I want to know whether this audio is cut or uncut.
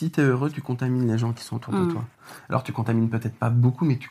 uncut